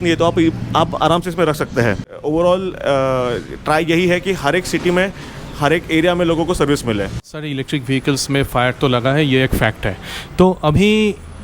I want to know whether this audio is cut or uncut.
cut